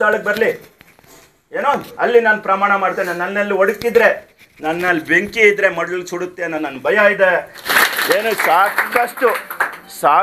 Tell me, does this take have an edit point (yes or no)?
yes